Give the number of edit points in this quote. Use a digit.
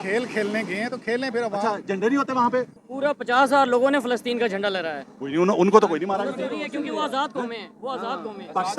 1